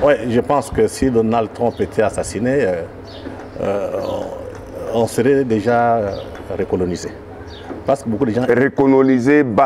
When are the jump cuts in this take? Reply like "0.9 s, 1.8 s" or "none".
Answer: none